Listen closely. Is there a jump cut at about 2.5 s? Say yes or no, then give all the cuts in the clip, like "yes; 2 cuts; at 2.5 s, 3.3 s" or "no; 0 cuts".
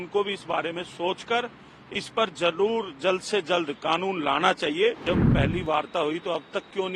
no; 1 cut; at 5.0 s